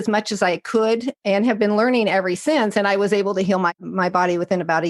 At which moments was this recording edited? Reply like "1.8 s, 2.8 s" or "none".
1.1 s, 3.8 s